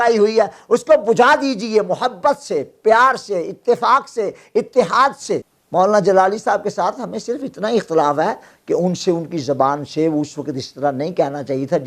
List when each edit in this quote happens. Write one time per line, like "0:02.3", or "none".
none